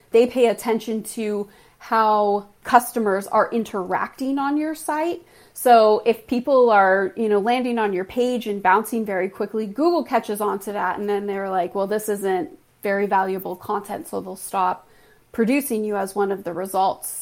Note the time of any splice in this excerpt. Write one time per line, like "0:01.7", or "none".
none